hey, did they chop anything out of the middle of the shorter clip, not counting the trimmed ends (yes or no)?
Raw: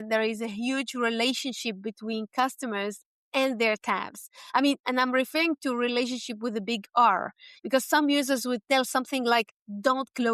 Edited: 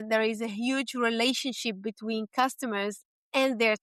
no